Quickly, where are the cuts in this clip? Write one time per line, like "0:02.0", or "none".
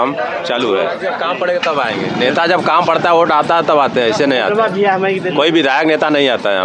0:01.1